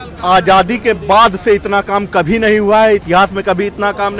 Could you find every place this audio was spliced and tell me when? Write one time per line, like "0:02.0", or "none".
none